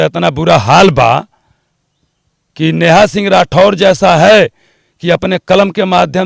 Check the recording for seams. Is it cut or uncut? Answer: uncut